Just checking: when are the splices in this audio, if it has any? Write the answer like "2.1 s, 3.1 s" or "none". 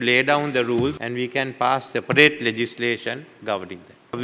1.0 s